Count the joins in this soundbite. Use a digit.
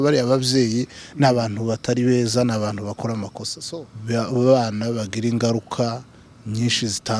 1